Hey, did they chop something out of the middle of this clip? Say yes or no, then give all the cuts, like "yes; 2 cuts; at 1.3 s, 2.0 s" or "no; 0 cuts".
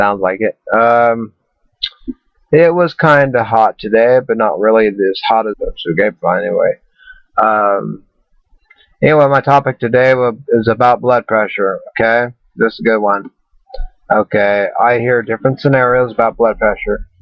no; 0 cuts